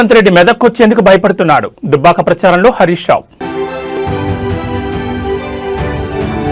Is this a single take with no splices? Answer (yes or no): yes